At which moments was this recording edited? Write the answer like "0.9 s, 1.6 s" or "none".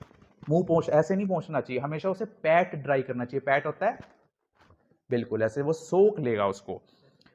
none